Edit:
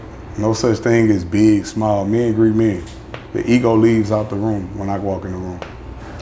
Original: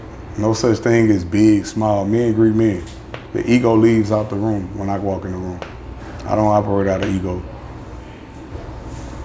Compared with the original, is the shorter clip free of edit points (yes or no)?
yes